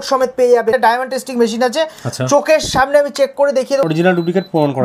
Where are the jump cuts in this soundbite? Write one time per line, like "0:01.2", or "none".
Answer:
0:00.7
0:03.8